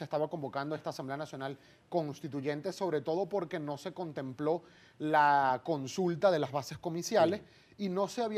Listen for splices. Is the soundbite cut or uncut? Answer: uncut